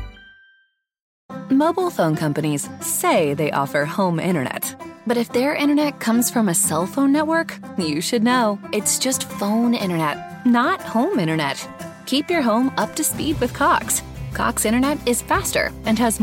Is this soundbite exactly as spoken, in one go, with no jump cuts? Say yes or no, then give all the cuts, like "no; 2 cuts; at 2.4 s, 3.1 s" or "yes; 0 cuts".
no; 1 cut; at 1.1 s